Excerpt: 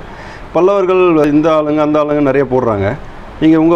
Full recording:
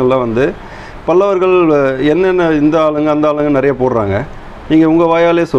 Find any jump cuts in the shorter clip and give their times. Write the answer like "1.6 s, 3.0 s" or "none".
1.2 s